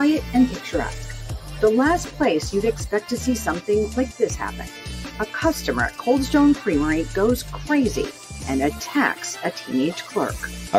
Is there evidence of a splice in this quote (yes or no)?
no